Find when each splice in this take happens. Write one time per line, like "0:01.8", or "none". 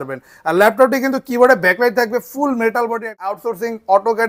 0:03.1